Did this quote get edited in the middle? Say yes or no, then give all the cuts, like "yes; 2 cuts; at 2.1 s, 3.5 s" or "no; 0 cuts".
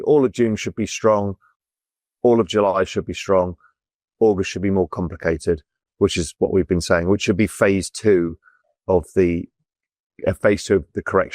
no; 0 cuts